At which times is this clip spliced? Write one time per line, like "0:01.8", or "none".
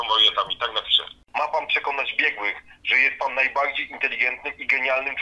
0:01.1